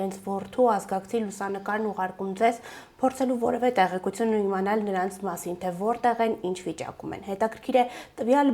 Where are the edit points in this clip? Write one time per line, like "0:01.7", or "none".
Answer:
none